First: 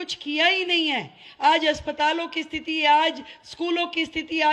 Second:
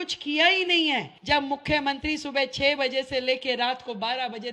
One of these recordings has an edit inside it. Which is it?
second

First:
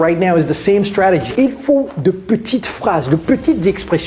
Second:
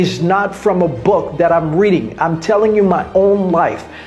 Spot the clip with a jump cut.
first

